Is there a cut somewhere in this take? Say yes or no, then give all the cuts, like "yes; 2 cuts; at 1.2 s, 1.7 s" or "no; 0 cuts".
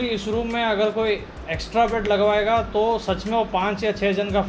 no; 0 cuts